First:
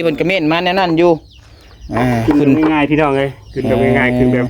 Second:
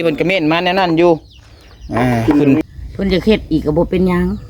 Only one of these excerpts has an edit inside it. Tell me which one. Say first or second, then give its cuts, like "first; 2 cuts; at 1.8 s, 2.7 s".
second; 1 cut; at 2.6 s